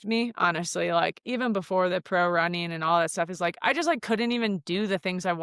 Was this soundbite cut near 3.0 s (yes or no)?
no